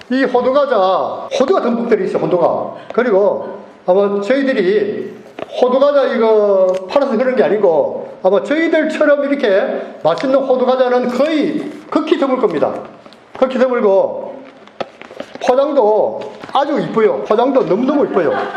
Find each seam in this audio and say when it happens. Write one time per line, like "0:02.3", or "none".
0:17.2